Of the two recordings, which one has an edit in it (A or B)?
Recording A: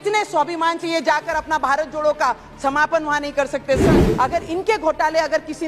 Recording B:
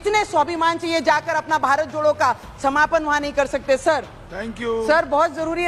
A